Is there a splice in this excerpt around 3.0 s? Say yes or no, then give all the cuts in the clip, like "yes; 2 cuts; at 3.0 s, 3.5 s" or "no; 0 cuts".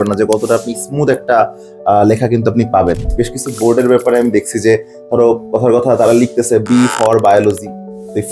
yes; 1 cut; at 3.0 s